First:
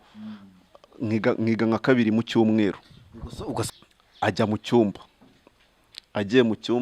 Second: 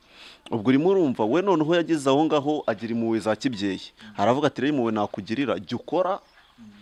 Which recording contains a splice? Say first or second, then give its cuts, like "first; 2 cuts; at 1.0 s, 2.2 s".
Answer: first; 1 cut; at 3.7 s